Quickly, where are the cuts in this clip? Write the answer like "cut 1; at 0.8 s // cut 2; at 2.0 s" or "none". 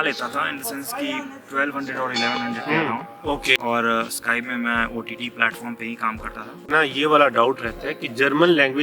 cut 1; at 3.6 s // cut 2; at 6.7 s